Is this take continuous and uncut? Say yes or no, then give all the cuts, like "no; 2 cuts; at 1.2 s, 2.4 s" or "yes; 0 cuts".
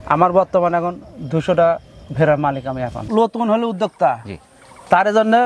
no; 1 cut; at 3.1 s